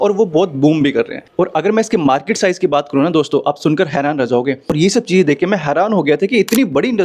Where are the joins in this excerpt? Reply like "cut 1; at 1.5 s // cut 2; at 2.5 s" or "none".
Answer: cut 1; at 4.6 s